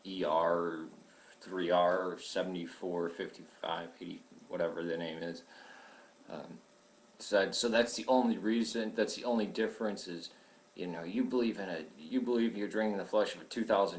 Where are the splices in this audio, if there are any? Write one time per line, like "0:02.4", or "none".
0:07.7

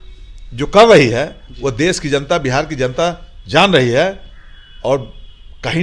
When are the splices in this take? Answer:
none

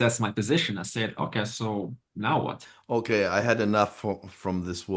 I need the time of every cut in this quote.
0:02.7

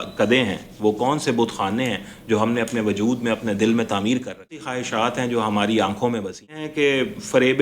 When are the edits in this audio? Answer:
0:04.8
0:06.7

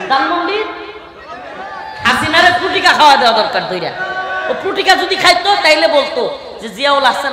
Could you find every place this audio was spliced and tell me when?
0:01.8

